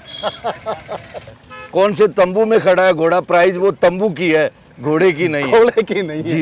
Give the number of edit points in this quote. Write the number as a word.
one